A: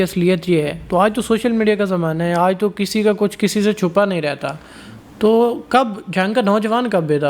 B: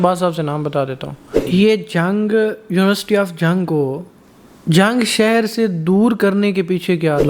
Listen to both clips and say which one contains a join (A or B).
B